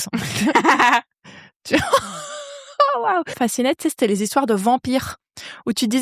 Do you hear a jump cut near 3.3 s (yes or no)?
yes